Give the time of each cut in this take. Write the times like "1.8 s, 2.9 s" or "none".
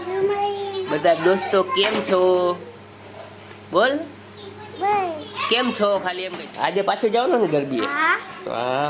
6.3 s